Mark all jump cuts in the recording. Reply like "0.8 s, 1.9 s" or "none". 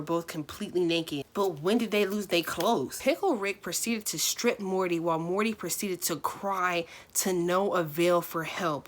2.9 s